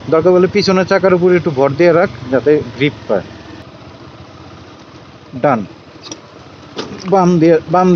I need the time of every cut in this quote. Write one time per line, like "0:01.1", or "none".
0:03.6